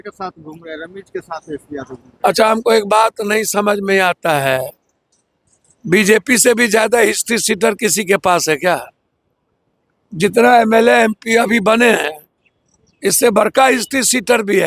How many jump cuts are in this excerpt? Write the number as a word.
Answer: zero